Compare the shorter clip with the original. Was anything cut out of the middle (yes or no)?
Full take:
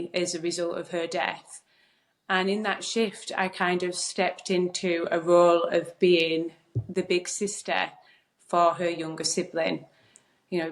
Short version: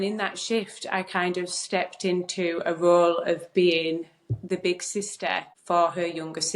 yes